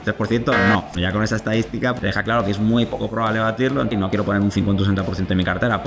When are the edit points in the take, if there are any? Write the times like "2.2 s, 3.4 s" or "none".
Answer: 1.0 s, 2.0 s, 3.9 s